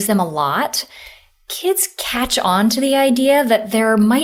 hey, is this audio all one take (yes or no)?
yes